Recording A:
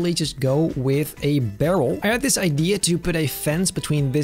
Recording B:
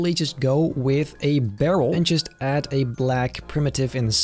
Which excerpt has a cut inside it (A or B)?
A